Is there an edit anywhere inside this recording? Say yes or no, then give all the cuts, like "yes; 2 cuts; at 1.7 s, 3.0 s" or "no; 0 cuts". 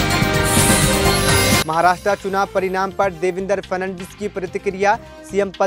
no; 0 cuts